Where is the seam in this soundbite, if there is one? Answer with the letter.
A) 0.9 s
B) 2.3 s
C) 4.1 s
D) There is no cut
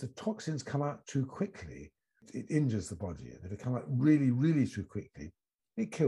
B